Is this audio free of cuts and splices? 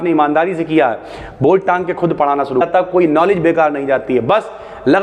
no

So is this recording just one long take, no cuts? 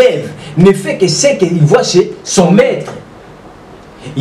yes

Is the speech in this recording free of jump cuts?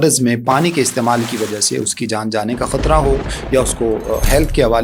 yes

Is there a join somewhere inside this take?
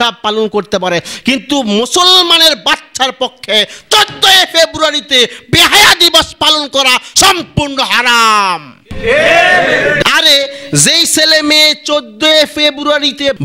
yes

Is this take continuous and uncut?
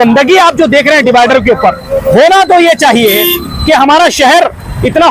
yes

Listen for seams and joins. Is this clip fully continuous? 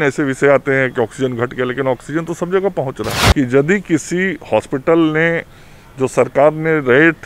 no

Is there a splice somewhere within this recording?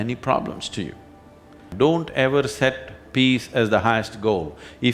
yes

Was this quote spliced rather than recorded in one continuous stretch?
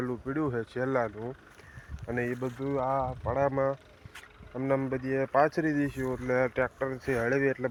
no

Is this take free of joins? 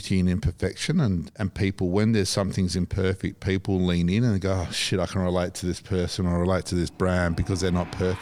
yes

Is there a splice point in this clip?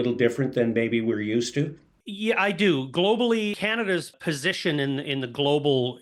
no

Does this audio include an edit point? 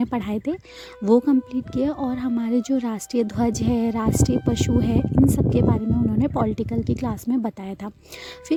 no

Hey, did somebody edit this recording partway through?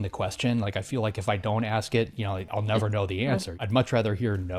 yes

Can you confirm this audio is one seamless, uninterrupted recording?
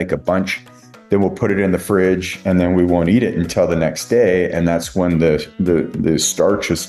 yes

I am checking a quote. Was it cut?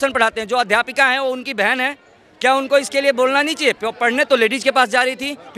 no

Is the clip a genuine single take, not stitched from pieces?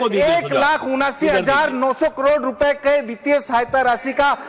yes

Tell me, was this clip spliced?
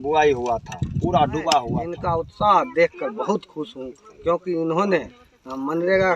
yes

